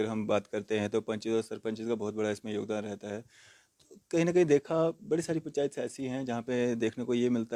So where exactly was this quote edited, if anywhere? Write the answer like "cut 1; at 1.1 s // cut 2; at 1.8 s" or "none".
none